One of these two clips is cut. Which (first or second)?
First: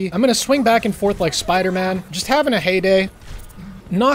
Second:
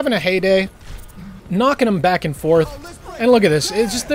second